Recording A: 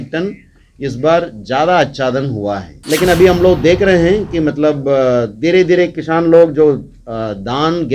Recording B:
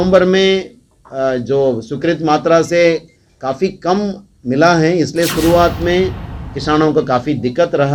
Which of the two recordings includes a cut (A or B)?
A